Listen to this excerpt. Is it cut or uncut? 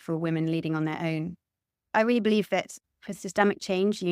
cut